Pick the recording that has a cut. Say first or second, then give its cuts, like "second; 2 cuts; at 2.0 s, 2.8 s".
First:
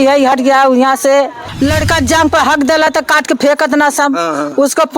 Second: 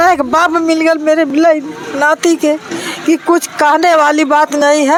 first; 1 cut; at 1.4 s